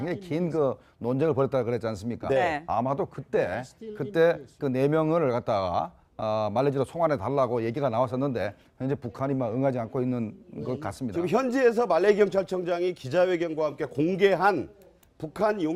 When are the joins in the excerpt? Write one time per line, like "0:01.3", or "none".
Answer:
none